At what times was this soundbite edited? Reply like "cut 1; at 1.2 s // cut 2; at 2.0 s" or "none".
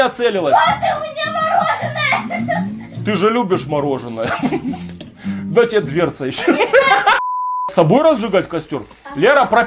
cut 1; at 7.7 s